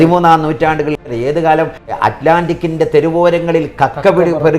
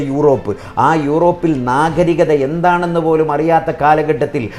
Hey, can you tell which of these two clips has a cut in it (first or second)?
first